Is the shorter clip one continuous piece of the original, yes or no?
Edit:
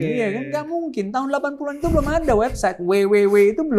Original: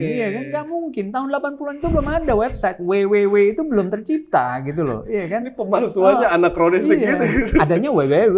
yes